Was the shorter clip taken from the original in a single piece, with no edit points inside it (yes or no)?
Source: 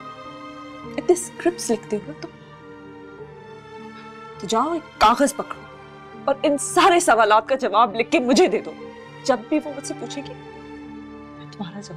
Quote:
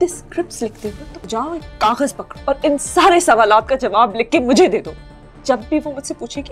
no